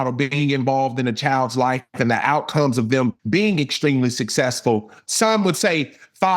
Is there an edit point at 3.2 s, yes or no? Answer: yes